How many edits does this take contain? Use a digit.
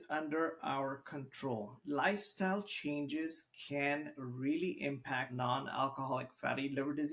2